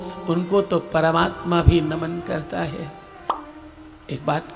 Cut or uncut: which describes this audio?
uncut